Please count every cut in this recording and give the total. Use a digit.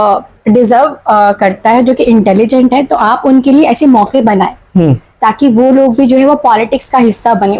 0